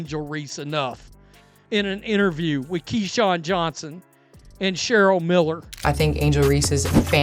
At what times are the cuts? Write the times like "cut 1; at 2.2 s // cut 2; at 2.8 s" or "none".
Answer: cut 1; at 5.7 s